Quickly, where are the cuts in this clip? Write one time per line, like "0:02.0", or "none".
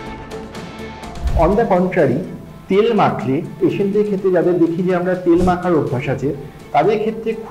0:01.3
0:03.6